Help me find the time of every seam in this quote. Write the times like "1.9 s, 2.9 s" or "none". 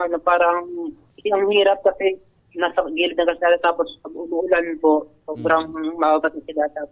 none